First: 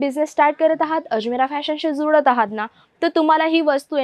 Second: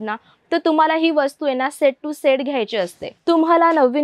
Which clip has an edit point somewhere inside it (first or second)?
second